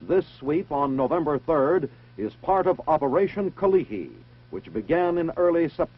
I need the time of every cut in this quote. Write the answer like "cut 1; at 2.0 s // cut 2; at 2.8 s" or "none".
cut 1; at 3.6 s